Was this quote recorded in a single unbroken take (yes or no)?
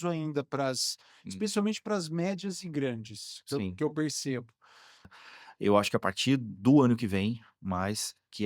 no